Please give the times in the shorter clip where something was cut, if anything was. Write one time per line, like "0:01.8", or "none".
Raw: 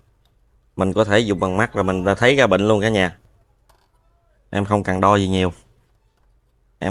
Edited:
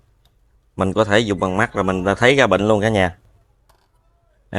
none